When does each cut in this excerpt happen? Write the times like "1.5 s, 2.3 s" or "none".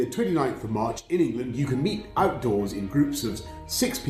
none

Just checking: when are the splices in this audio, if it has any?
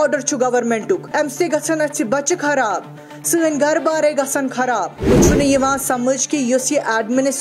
1.1 s, 5.1 s

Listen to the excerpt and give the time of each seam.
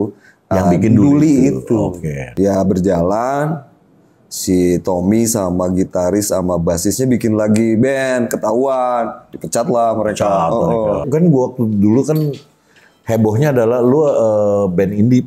2.3 s, 11.0 s

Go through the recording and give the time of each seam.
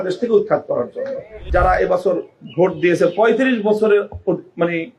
1.4 s

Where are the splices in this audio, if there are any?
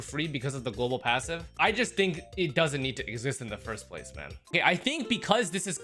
1.5 s, 4.4 s

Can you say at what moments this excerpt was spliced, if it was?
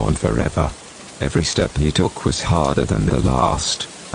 2.1 s

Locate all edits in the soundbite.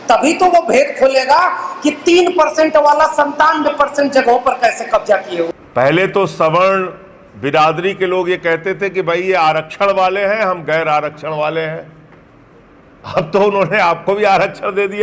5.6 s

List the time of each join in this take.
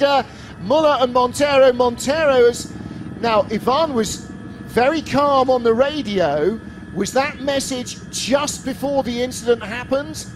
4.6 s

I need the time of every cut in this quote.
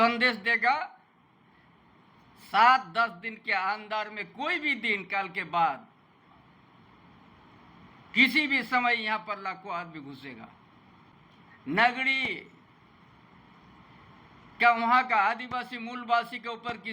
11.1 s

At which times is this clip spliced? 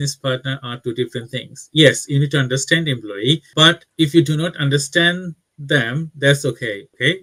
none

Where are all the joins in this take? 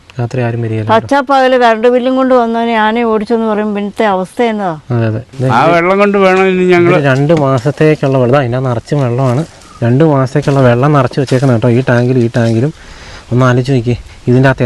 5.3 s

